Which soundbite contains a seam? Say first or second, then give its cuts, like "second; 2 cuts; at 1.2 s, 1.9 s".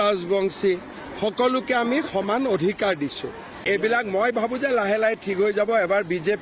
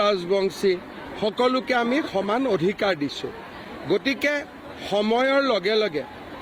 first; 1 cut; at 3.5 s